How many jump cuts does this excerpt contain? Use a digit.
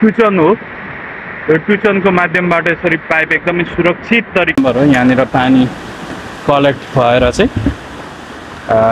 1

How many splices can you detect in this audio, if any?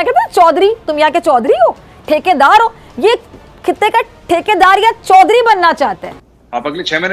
1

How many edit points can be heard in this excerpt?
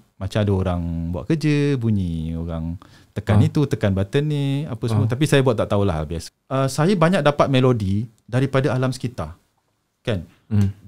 1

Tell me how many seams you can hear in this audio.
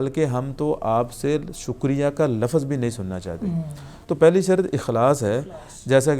0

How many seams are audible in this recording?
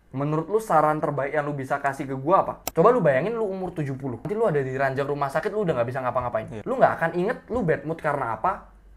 3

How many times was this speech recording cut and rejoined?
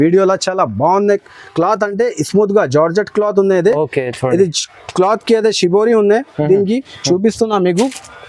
0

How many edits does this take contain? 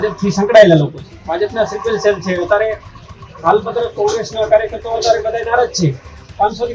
1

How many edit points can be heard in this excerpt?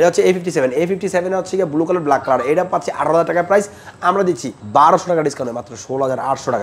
1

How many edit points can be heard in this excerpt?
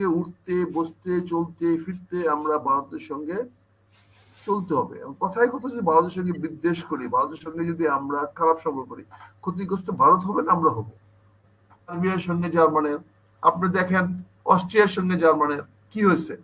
1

